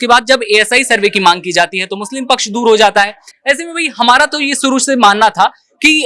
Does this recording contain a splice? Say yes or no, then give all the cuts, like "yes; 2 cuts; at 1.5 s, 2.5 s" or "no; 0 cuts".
no; 0 cuts